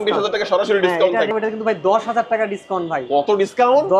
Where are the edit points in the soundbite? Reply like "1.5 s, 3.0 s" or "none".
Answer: 1.3 s